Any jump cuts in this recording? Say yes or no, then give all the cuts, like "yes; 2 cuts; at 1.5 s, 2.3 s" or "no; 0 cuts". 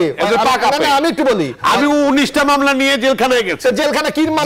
no; 0 cuts